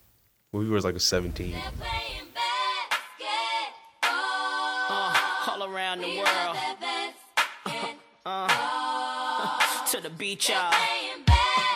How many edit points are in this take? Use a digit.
1